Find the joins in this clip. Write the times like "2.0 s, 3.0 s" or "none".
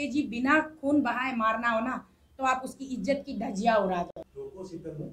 4.2 s